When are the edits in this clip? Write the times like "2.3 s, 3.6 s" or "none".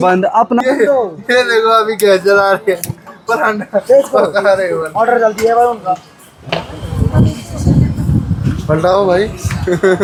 none